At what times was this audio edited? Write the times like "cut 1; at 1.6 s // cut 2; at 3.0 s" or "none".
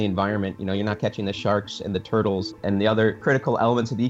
cut 1; at 2.5 s // cut 2; at 3.2 s